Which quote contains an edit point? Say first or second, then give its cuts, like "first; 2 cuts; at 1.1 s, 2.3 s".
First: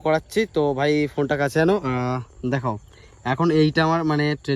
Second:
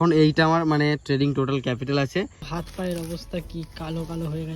second; 1 cut; at 2.5 s